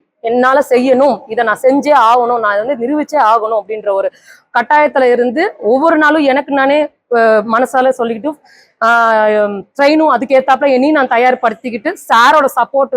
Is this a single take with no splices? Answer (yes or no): yes